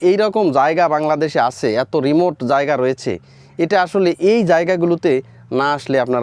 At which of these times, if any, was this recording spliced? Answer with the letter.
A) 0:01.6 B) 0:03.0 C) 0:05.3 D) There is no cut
D